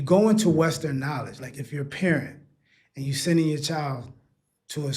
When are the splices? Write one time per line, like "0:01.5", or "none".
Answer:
0:01.6